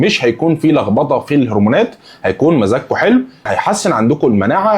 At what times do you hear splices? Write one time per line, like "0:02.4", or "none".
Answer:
0:03.5